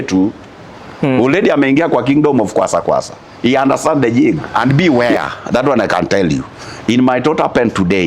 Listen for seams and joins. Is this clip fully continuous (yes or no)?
no